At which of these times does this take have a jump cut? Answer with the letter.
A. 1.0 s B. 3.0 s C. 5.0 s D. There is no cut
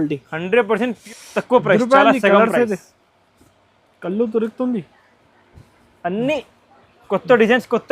A